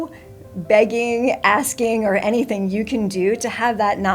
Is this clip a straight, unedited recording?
yes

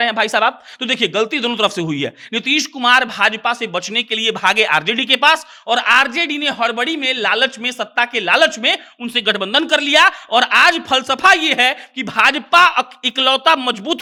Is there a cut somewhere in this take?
no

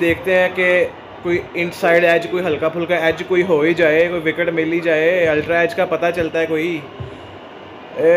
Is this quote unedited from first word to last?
yes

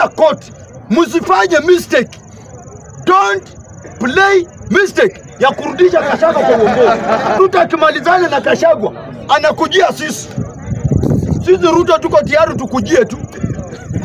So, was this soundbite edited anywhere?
yes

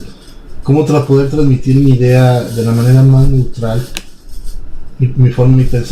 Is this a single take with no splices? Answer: no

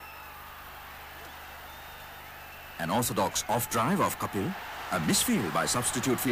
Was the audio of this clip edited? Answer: no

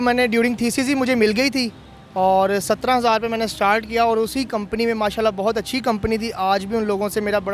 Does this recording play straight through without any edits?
yes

